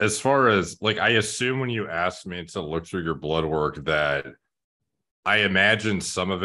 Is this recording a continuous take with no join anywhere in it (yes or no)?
yes